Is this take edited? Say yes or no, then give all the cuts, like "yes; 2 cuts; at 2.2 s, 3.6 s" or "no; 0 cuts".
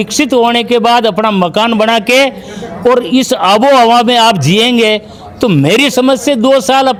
no; 0 cuts